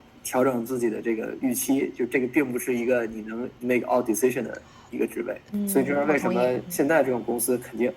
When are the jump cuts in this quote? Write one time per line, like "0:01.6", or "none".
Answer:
0:03.5
0:05.5
0:06.7